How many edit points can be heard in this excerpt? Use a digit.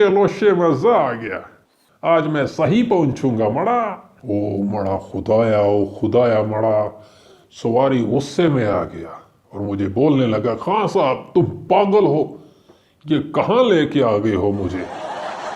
1